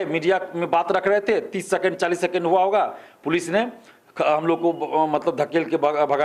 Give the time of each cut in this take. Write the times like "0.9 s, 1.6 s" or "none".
none